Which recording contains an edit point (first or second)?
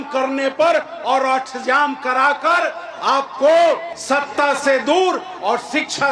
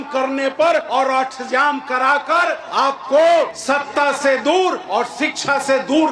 second